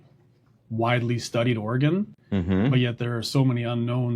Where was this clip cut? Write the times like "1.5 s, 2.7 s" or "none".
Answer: none